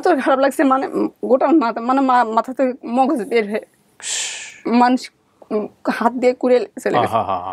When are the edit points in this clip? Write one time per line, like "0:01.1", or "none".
none